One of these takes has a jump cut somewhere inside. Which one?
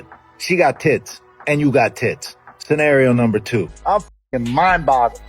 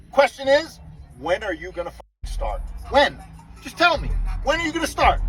first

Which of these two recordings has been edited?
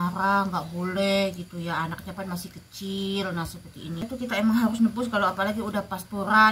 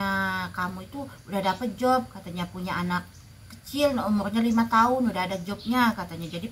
first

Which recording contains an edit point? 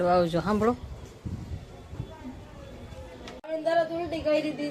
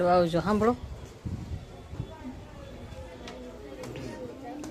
first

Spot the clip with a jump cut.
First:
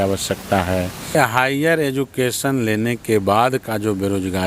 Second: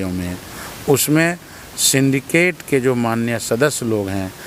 first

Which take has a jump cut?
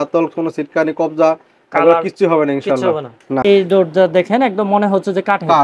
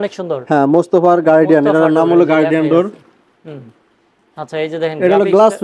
first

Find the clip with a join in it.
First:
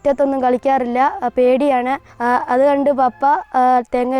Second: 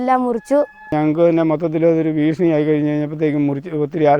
second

